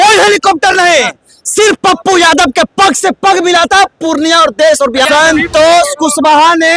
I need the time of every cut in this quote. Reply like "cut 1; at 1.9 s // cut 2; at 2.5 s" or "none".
cut 1; at 5.1 s